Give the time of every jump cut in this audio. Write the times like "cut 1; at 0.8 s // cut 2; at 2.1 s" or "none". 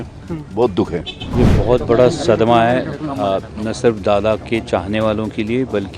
cut 1; at 1.2 s